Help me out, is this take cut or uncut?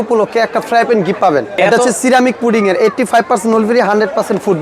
cut